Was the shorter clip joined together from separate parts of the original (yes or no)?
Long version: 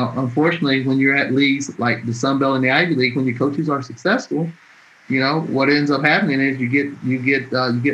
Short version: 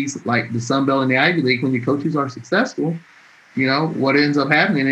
no